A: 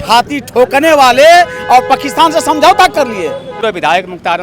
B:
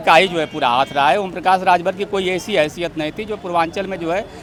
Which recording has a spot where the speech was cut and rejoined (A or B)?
A